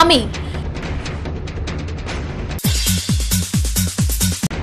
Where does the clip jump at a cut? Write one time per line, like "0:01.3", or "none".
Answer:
0:00.8
0:02.1